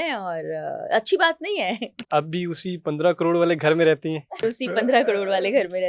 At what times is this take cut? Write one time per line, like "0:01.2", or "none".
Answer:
0:02.0
0:04.4